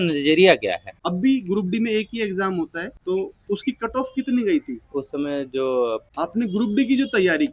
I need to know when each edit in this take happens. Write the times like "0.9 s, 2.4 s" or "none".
0.9 s, 2.9 s, 6.1 s